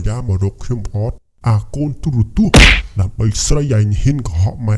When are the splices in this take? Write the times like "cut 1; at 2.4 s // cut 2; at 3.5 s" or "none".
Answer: cut 1; at 1.3 s